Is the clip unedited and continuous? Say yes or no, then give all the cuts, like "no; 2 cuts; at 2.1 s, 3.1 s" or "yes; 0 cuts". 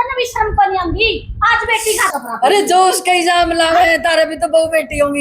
no; 1 cut; at 2.1 s